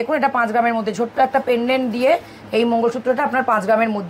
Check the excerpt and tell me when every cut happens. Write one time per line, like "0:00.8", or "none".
none